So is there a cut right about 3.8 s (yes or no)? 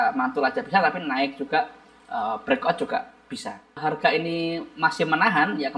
yes